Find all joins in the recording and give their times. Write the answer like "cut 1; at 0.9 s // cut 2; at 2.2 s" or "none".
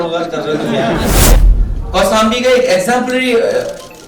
cut 1; at 1.4 s